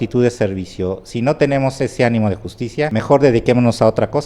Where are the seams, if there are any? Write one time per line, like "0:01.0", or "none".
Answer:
0:02.9